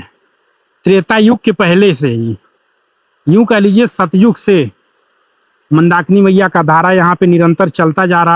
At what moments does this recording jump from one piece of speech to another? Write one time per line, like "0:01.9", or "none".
none